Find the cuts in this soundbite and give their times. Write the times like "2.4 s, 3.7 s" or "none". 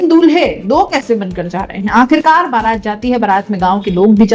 none